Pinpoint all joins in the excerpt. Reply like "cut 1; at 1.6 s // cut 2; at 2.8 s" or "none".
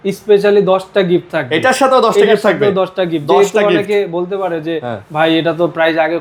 none